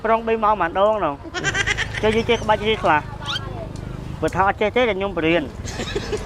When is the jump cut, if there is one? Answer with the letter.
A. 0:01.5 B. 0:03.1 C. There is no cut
A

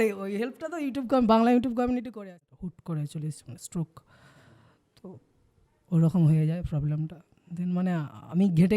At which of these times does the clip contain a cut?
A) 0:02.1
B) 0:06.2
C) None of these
A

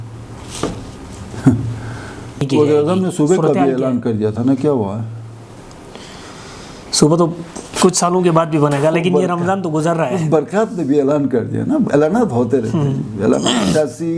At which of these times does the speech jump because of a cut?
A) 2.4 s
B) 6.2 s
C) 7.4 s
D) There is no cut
A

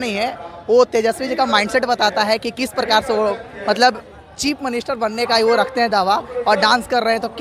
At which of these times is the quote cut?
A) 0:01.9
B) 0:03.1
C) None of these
C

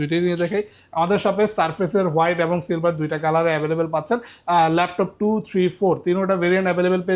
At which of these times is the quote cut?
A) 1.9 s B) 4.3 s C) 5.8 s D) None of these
D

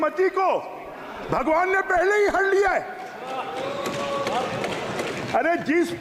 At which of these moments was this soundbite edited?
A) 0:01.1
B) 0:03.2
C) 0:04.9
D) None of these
D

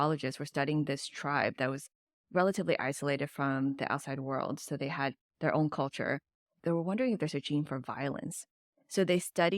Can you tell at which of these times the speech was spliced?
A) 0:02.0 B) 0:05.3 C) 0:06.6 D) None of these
C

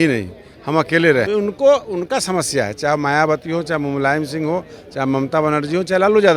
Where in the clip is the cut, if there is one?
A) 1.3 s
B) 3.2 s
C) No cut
A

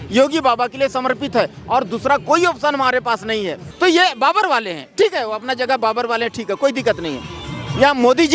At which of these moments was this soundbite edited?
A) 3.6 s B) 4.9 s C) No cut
A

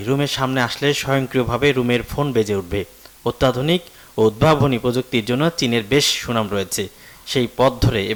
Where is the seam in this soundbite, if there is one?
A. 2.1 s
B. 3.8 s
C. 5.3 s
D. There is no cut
D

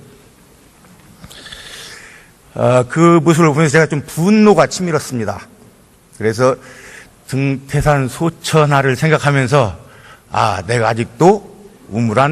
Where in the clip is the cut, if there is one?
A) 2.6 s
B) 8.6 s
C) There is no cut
A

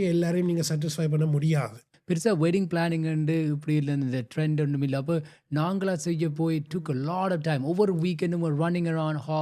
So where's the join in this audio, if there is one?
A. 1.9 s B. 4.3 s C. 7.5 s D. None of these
A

